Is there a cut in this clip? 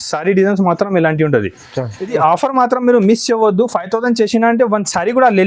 yes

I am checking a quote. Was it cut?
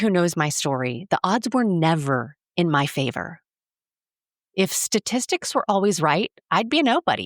no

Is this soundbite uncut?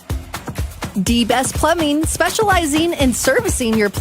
no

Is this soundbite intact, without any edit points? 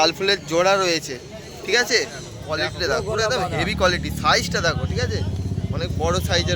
no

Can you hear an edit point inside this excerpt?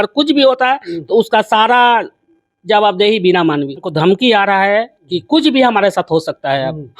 yes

